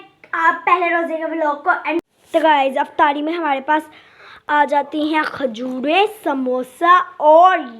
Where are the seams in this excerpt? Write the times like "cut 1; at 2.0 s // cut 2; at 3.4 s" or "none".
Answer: cut 1; at 2.0 s